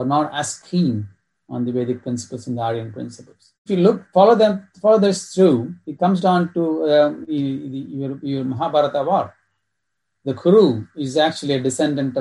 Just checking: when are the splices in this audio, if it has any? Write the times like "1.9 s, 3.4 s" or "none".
3.7 s